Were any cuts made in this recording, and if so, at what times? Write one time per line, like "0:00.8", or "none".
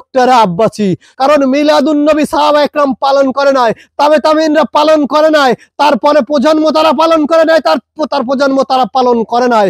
0:01.1